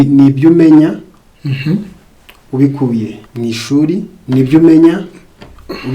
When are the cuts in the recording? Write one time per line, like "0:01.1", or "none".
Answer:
0:03.2
0:04.1